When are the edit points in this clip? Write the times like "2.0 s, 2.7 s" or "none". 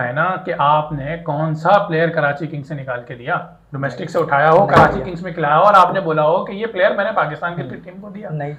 none